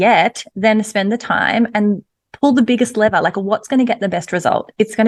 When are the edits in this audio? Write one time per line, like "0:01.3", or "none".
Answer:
none